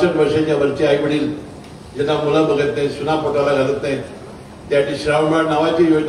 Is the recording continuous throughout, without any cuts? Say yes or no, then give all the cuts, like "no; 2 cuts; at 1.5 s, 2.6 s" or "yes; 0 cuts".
yes; 0 cuts